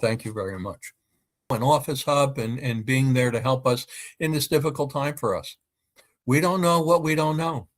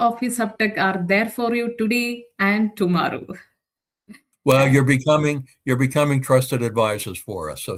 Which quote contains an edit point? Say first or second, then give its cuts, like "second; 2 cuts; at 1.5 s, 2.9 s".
first; 1 cut; at 1.5 s